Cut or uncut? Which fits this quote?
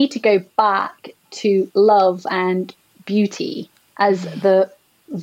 uncut